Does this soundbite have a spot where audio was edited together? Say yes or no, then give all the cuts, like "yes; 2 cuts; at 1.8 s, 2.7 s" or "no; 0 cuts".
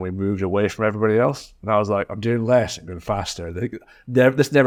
no; 0 cuts